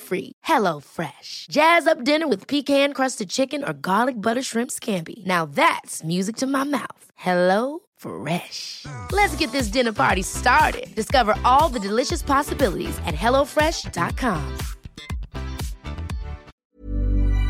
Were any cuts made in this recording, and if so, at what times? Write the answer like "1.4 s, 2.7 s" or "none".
16.5 s